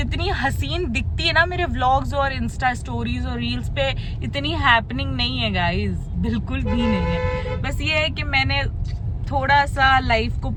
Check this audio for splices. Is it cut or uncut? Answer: uncut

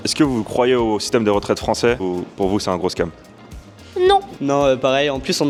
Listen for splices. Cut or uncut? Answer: uncut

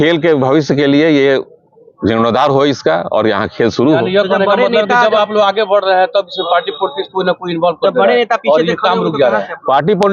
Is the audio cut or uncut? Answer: uncut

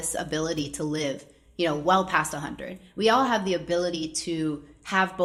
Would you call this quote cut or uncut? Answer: uncut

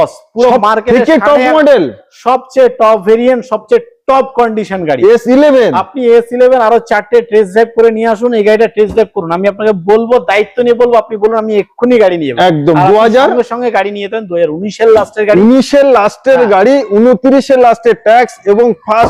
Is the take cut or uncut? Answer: uncut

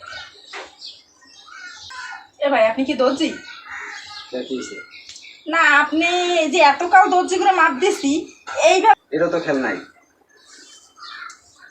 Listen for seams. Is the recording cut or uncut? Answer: cut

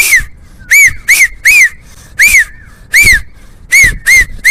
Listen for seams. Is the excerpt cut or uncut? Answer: uncut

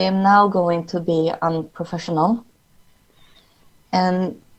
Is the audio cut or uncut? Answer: uncut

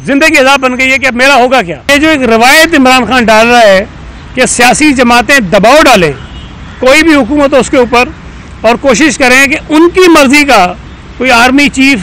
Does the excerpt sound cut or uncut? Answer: cut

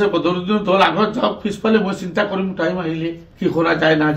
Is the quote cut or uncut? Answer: uncut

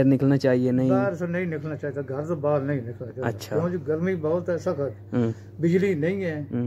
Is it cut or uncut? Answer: uncut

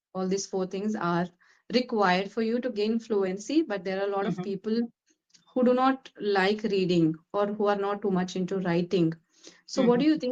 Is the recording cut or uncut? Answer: uncut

